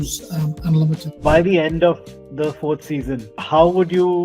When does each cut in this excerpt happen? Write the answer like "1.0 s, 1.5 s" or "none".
1.1 s, 3.3 s